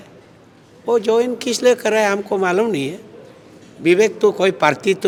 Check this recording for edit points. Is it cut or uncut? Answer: uncut